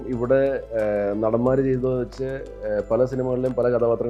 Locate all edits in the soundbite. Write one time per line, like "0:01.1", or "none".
none